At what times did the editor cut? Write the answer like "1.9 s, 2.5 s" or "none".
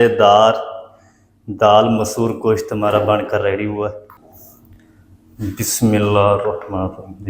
4.1 s